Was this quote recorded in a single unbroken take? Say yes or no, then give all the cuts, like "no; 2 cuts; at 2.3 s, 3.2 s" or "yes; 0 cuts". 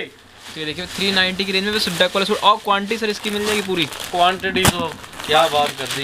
yes; 0 cuts